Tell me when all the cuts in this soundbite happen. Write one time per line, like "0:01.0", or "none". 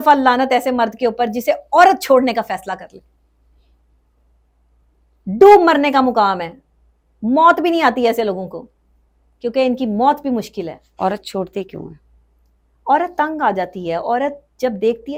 none